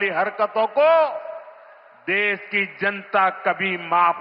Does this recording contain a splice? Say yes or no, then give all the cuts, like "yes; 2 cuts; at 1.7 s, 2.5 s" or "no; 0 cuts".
no; 0 cuts